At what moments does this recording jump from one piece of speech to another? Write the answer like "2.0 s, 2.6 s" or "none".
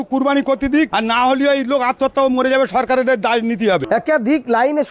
0.9 s, 3.8 s